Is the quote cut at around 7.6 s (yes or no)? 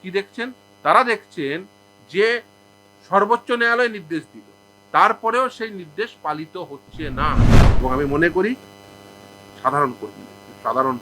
yes